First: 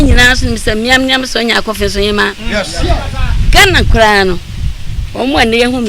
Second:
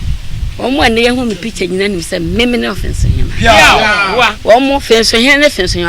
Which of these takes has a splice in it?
second; 1 cut; at 4.4 s

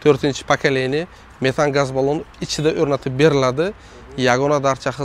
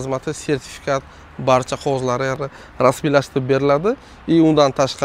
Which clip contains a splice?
second; 1 cut; at 2.4 s

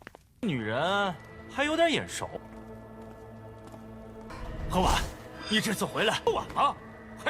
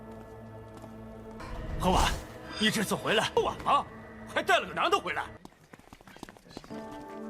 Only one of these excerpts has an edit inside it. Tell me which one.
second; 1 cut; at 5.4 s

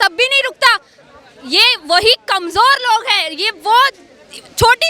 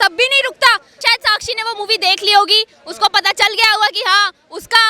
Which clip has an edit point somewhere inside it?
second; 1 cut; at 1.0 s

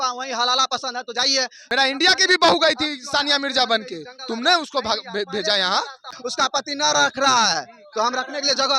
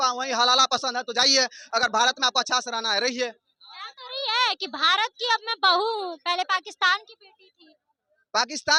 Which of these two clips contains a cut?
first; 2 cuts; at 1.6 s, 6.2 s

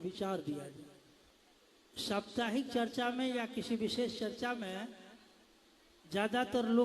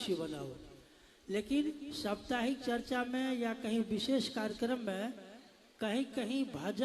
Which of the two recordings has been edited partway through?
first; 1 cut; at 1.3 s

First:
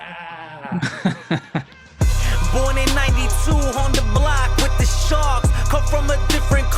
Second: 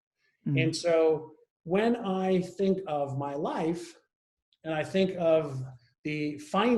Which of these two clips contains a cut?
first; 1 cut; at 1.8 s

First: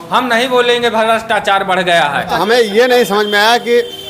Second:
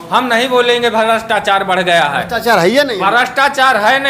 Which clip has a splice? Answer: first; 1 cut; at 2.4 s

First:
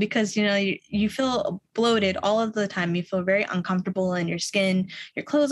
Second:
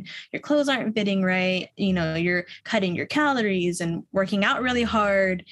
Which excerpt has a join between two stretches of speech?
second; 2 cuts; at 1.7 s, 4.0 s

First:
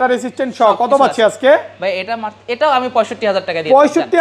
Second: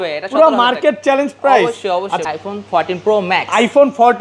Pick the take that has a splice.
second; 1 cut; at 2.2 s

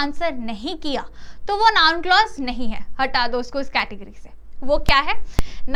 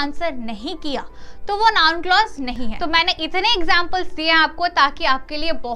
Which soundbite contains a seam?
second; 1 cut; at 2.7 s

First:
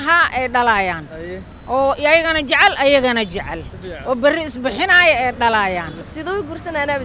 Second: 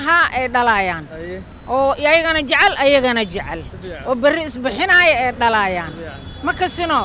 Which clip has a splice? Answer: first; 1 cut; at 6.0 s

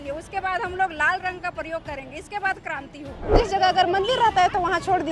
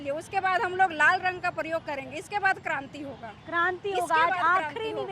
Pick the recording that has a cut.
first; 1 cut; at 3.3 s

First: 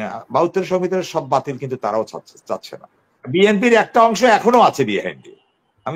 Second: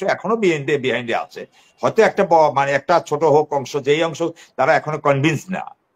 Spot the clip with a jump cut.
first; 1 cut; at 3.2 s

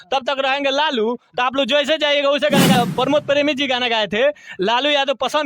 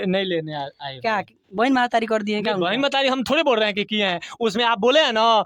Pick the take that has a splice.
first; 1 cut; at 2.8 s

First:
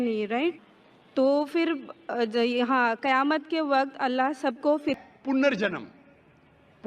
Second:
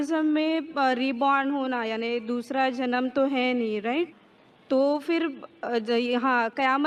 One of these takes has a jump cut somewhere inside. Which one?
first; 1 cut; at 5.0 s

